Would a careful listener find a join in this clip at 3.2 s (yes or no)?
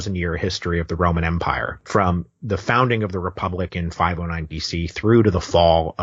no